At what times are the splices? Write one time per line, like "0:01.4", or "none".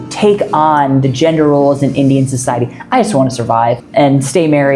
0:03.8